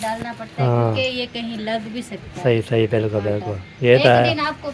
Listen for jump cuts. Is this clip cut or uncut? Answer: uncut